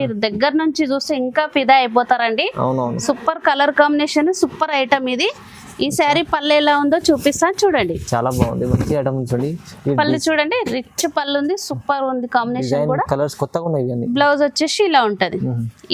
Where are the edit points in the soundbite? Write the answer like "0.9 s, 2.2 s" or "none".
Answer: none